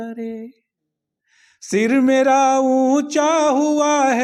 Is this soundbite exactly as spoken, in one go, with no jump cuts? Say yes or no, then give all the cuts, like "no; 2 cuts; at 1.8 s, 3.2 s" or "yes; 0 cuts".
yes; 0 cuts